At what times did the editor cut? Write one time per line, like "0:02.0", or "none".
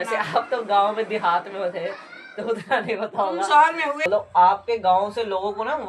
0:04.1